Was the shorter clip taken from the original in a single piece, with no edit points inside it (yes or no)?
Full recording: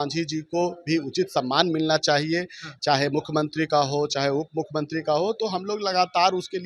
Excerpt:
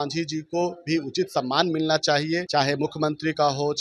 no